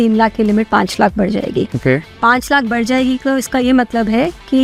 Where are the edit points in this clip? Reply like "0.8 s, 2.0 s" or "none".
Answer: none